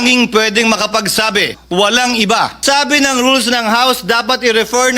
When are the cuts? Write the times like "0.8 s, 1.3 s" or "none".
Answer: 1.6 s, 2.6 s

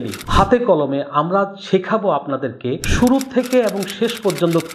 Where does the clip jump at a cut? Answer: 2.8 s

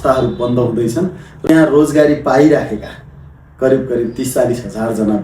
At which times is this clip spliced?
1.3 s

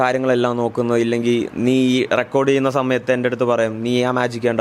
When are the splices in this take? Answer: none

